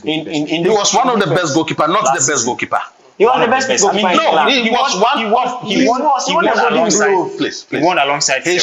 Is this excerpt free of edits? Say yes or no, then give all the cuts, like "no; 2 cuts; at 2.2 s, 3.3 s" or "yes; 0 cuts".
yes; 0 cuts